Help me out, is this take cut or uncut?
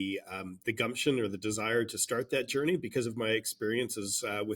uncut